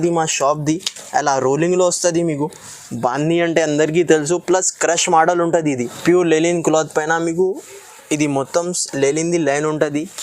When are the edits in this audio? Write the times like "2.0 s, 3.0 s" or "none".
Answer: 5.9 s